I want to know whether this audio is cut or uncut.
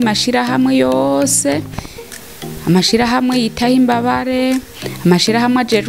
uncut